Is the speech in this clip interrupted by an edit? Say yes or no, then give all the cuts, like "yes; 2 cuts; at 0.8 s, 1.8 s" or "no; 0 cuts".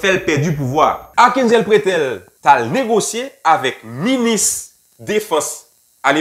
yes; 2 cuts; at 1.0 s, 2.3 s